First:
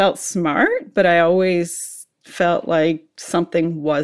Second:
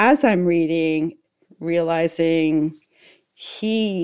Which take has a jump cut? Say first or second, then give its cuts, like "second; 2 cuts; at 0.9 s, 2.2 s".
second; 1 cut; at 1.2 s